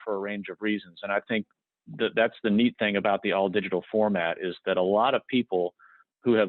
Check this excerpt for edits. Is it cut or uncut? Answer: uncut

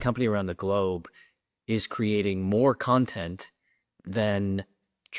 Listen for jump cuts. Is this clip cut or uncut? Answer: uncut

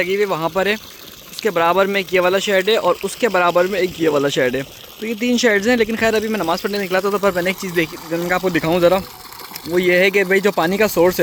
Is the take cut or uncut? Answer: uncut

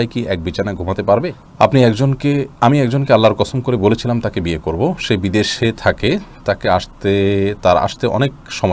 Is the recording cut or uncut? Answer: cut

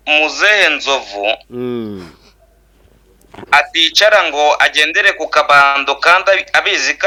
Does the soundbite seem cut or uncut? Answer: uncut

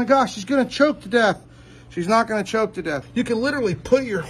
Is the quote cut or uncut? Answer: cut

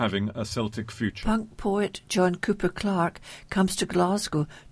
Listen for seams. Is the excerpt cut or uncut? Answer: cut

